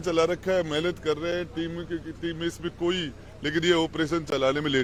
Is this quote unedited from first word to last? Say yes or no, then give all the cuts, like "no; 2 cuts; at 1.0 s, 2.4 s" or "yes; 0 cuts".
yes; 0 cuts